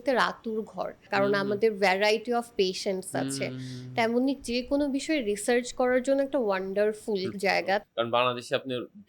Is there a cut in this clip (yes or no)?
yes